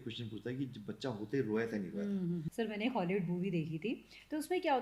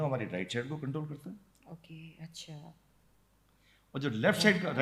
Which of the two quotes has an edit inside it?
first; 1 cut; at 2.5 s

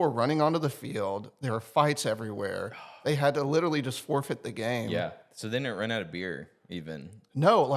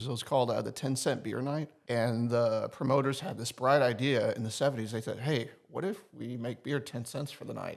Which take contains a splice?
second; 1 cut; at 1.7 s

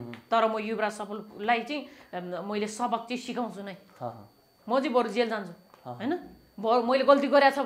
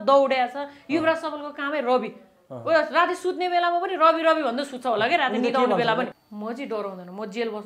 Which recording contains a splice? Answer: second; 1 cut; at 6.1 s

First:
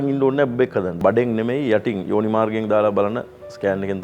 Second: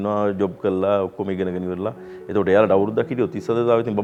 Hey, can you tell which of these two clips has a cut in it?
first; 1 cut; at 1.0 s

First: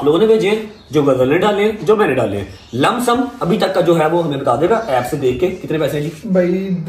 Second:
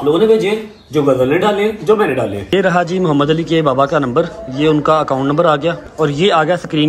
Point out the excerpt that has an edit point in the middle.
second; 2 cuts; at 2.5 s, 5.8 s

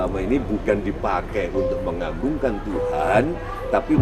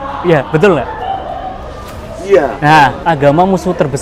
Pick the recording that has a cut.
second; 1 cut; at 3.0 s

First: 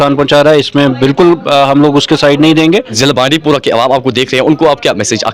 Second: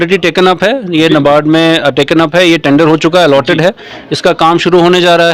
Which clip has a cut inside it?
first; 1 cut; at 2.9 s

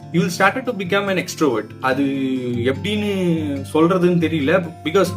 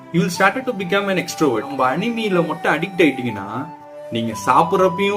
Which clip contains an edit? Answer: second; 1 cut; at 1.7 s

